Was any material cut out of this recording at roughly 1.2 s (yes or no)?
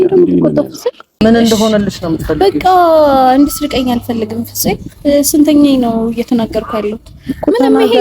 yes